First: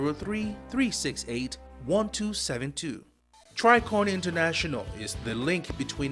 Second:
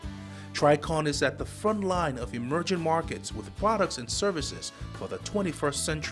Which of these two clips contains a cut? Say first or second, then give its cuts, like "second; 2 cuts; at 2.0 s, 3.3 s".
first; 1 cut; at 3.4 s